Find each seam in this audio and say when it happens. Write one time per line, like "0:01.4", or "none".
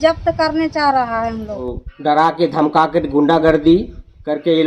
0:01.7